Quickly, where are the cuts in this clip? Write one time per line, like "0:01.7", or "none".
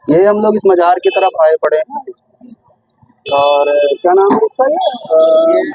none